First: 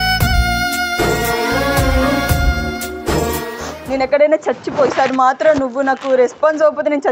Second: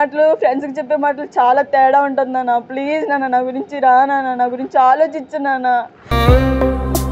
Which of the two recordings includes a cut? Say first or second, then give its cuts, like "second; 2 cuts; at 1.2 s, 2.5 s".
first; 1 cut; at 3.4 s